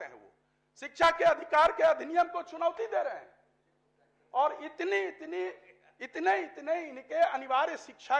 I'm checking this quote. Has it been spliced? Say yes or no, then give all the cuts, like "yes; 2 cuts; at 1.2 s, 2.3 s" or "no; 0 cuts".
no; 0 cuts